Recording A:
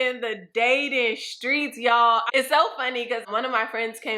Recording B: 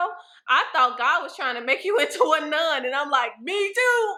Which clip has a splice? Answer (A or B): A